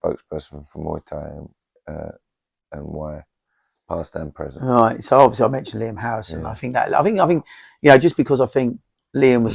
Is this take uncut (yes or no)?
yes